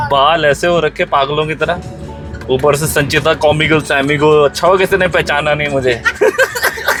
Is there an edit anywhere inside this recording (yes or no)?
no